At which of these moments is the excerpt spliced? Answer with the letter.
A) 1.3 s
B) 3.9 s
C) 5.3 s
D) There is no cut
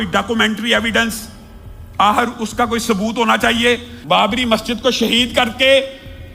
B